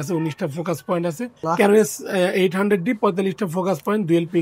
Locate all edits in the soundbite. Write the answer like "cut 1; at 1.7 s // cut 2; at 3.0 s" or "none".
cut 1; at 1.4 s